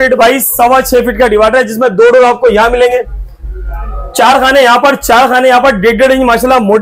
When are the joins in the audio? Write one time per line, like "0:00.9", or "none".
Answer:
none